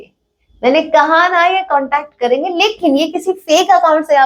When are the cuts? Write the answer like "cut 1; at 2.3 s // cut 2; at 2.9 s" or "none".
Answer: none